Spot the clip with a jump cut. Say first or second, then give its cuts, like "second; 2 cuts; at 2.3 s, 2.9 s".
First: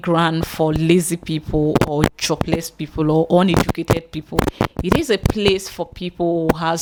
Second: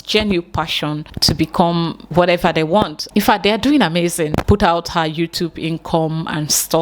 second; 3 cuts; at 1.1 s, 3.0 s, 4.4 s